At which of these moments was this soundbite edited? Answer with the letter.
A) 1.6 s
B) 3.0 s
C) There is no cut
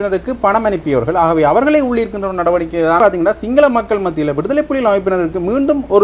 B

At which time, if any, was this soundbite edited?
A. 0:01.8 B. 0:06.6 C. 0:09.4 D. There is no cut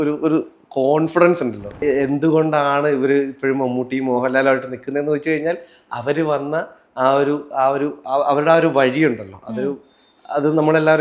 A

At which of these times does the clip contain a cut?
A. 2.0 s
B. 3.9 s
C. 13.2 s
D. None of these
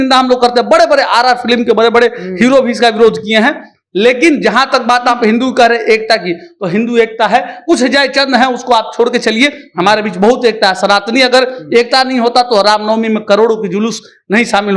D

